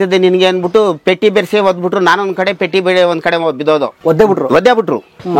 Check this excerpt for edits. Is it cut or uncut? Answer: cut